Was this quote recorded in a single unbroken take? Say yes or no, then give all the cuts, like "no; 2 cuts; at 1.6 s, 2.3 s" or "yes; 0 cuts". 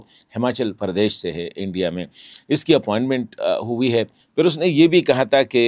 no; 1 cut; at 4.2 s